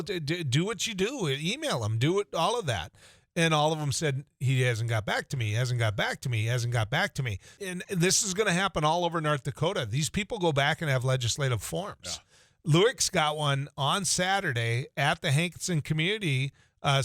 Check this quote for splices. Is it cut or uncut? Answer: cut